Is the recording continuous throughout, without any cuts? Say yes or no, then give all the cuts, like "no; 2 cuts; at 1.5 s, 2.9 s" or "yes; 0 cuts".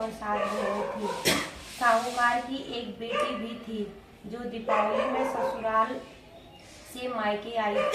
yes; 0 cuts